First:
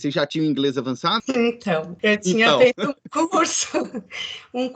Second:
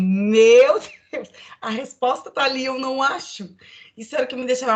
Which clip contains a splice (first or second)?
first